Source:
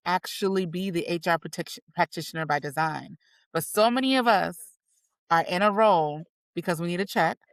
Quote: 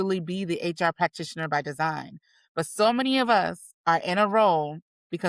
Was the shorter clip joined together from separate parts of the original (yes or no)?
yes